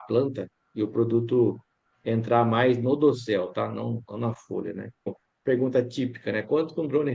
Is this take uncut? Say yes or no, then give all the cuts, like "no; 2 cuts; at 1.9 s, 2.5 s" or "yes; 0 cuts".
no; 1 cut; at 5.1 s